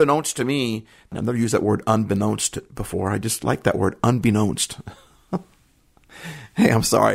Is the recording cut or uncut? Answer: cut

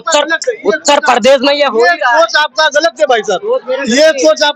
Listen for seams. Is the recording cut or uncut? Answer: uncut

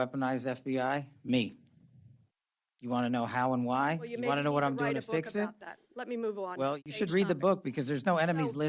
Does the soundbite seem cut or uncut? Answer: uncut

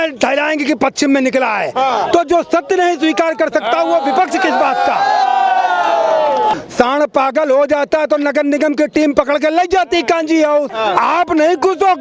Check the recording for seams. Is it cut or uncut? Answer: cut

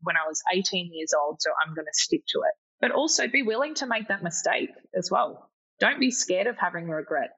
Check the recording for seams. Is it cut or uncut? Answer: cut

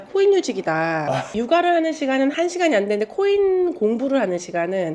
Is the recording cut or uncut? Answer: cut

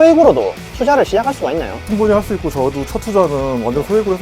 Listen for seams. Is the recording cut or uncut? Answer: cut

